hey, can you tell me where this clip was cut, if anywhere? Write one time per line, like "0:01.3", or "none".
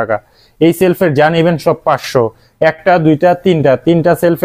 none